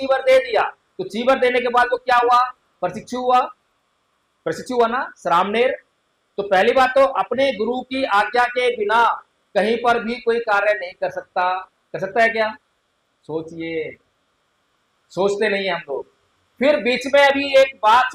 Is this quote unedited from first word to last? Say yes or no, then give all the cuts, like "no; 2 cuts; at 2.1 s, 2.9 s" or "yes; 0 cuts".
yes; 0 cuts